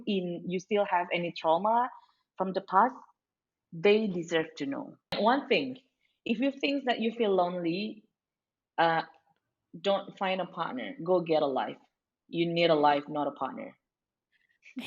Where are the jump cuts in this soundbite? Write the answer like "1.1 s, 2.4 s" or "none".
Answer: 5.1 s